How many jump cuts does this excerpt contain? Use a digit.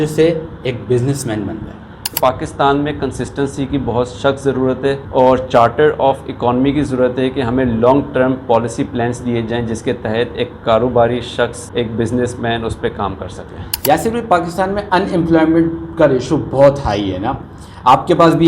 4